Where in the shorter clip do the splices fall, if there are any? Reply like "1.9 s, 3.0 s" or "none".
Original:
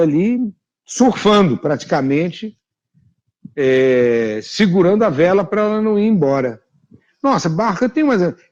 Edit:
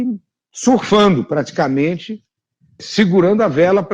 2.8 s